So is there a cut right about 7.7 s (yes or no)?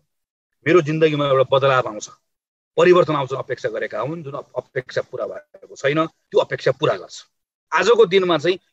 yes